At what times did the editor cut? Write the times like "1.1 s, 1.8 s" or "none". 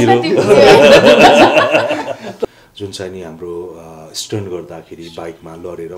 2.4 s